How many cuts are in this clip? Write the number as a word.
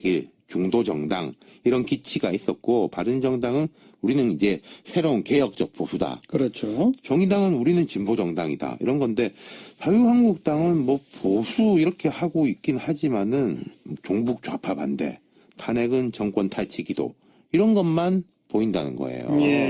one